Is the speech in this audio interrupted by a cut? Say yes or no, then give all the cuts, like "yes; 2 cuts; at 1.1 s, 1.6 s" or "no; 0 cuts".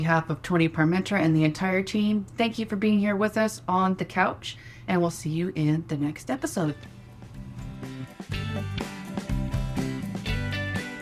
no; 0 cuts